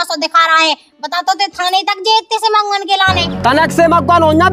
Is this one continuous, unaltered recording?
yes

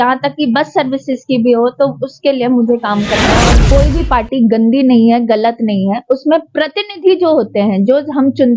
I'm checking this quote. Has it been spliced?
yes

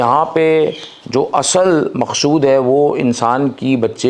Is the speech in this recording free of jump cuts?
yes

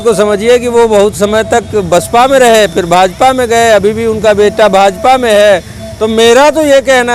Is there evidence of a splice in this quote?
no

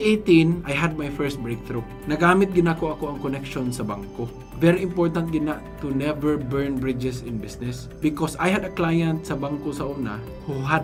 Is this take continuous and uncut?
yes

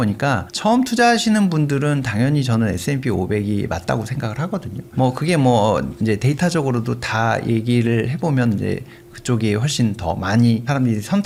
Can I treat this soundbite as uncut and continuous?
yes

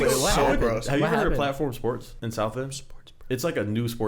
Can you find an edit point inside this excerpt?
yes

